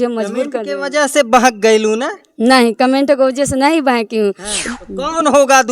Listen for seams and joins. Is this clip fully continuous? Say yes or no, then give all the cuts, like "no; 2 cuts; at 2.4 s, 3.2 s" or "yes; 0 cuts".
no; 1 cut; at 4.5 s